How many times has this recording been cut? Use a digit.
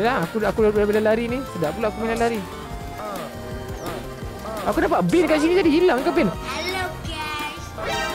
1